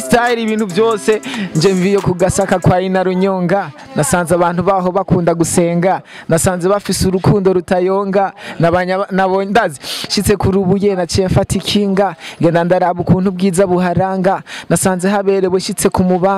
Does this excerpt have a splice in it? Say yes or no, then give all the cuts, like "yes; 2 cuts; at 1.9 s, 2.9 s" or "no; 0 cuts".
no; 0 cuts